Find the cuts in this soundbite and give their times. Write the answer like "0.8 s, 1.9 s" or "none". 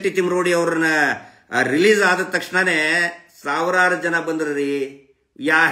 none